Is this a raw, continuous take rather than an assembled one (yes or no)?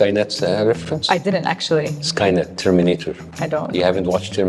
no